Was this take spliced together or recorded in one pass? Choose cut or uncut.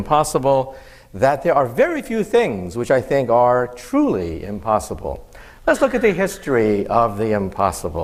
uncut